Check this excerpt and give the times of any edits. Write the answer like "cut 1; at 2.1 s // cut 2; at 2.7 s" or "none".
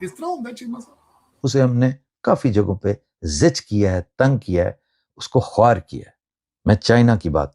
cut 1; at 1.2 s